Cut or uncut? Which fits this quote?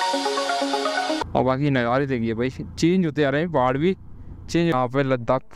cut